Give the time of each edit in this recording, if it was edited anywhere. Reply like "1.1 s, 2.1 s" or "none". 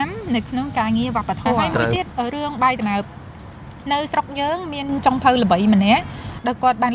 1.9 s